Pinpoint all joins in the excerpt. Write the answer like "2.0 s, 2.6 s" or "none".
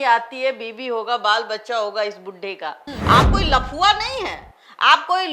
2.9 s

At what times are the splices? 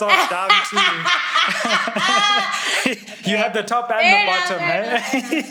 none

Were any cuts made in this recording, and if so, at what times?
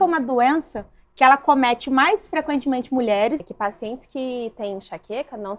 3.5 s

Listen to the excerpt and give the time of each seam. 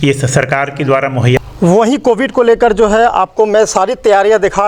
1.4 s

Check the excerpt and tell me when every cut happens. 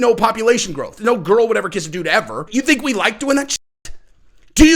0.9 s, 2.5 s

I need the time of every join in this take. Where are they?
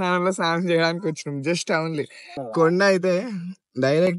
2.4 s

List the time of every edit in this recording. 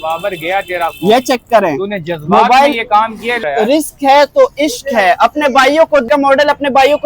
3.4 s, 6.1 s

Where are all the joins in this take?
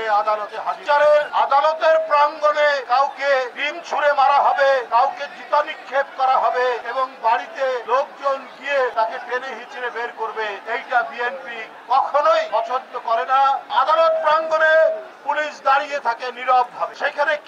6.8 s, 7.8 s, 8.9 s, 10.6 s, 12.5 s, 13.7 s

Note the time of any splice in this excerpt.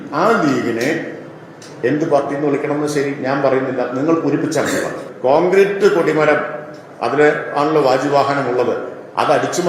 5.1 s

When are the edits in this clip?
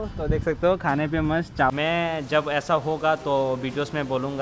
1.7 s

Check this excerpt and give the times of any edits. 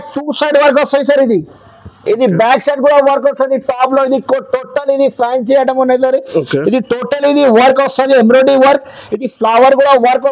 none

